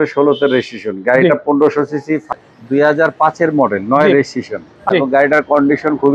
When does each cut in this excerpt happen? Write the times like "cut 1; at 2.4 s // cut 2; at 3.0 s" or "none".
cut 1; at 2.3 s // cut 2; at 4.8 s